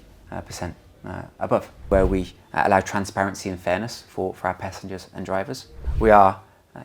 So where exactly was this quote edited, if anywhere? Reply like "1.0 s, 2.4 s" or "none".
1.9 s, 5.8 s